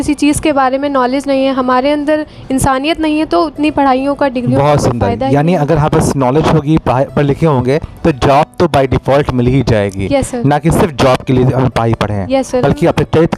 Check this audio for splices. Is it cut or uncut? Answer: uncut